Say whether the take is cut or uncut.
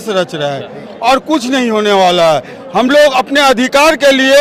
uncut